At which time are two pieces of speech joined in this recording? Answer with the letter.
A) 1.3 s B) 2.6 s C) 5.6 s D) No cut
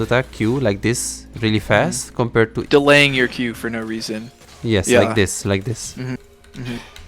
B